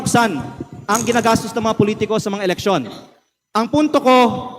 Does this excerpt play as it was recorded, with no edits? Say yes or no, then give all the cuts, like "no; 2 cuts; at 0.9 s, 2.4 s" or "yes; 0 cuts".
yes; 0 cuts